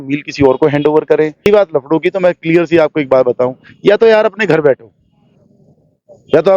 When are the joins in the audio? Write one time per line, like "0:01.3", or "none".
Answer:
0:01.5